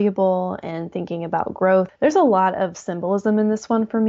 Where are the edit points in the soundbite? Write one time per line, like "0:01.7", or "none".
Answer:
0:01.9

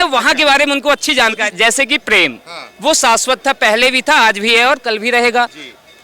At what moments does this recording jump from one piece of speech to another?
0:01.4

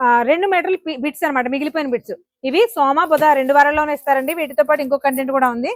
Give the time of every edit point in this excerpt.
none

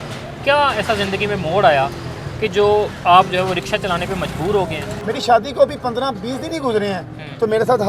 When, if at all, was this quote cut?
0:04.9

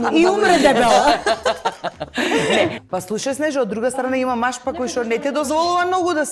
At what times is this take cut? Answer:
0:02.8

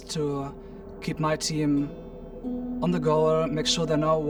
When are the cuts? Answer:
none

